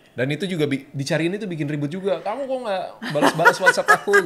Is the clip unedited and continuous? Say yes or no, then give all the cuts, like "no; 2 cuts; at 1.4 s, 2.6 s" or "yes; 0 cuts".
yes; 0 cuts